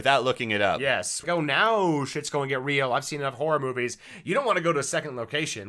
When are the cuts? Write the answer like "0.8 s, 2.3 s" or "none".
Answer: 1.2 s